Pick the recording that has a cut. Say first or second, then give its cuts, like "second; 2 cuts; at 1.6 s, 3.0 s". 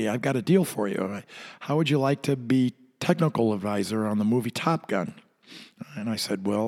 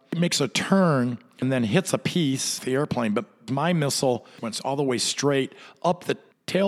second; 4 cuts; at 1.4 s, 2.6 s, 3.5 s, 4.4 s